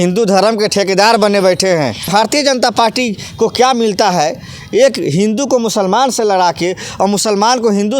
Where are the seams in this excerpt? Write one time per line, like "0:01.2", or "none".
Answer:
0:02.0